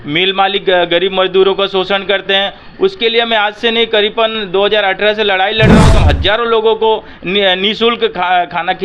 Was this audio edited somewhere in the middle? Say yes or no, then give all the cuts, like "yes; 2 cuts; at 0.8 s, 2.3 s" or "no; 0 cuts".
yes; 1 cut; at 5.9 s